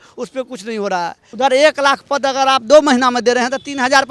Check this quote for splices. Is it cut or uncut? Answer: cut